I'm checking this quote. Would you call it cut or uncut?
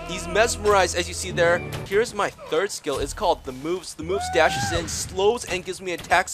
cut